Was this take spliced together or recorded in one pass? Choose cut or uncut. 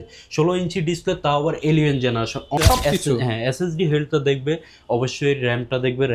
cut